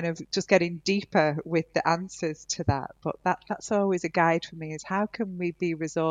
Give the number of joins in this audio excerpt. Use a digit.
0